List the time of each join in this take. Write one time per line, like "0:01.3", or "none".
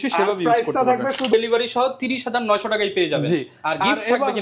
0:01.3